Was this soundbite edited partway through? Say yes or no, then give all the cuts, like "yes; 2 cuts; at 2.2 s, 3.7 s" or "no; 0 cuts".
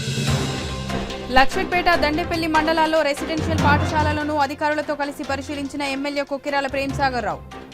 yes; 1 cut; at 1.1 s